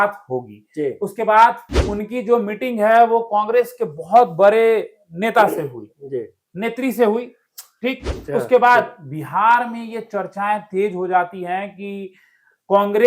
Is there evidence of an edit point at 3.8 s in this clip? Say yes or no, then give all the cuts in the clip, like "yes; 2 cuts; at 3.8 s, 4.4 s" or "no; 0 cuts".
no; 1 cut; at 1.7 s